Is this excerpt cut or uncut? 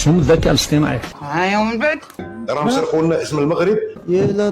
cut